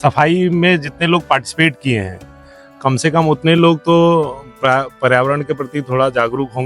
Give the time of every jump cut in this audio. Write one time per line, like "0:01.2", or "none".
none